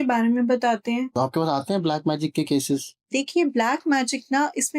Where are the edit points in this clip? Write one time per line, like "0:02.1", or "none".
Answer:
0:01.1
0:03.1

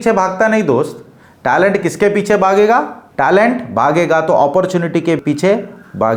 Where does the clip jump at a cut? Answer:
none

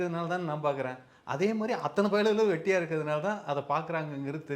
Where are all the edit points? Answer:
none

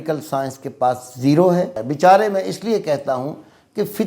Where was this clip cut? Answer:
0:01.8

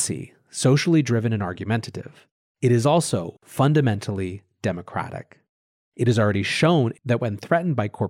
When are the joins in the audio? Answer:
0:07.0

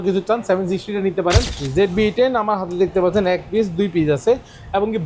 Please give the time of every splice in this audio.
0:01.6

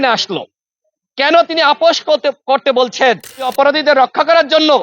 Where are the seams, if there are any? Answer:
0:03.5

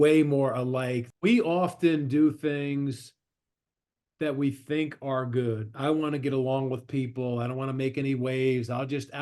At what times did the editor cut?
0:01.1

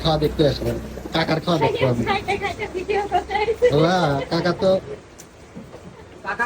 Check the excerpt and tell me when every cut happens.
none

